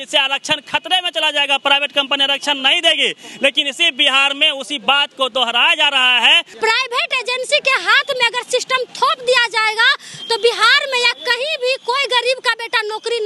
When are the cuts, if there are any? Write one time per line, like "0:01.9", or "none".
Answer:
0:06.5